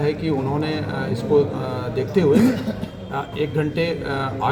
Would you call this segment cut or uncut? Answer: uncut